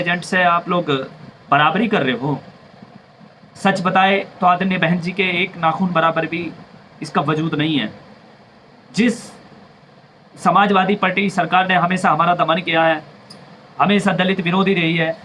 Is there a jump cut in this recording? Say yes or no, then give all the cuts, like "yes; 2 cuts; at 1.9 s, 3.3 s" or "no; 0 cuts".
no; 0 cuts